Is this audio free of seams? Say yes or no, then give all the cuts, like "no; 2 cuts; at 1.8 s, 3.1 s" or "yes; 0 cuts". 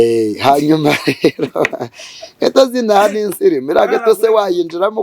yes; 0 cuts